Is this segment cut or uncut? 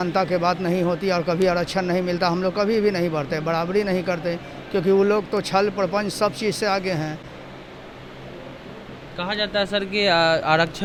uncut